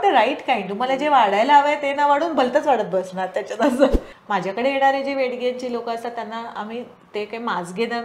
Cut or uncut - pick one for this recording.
cut